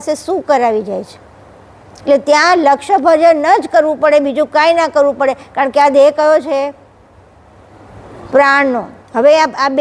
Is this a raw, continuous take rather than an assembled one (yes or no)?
yes